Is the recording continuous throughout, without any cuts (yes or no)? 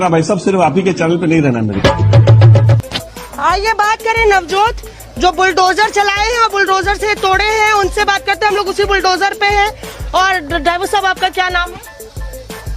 no